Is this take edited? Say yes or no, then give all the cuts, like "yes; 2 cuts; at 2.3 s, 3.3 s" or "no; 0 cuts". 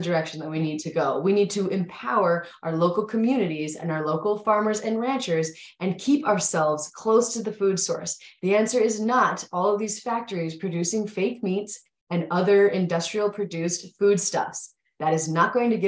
no; 0 cuts